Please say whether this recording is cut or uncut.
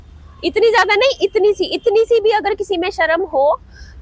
uncut